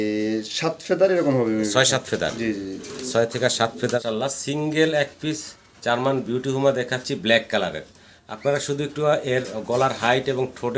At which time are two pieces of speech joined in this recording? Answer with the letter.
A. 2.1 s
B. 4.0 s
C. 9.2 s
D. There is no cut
B